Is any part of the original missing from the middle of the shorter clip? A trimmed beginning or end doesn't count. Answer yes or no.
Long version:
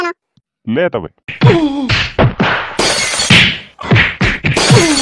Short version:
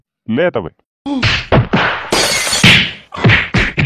yes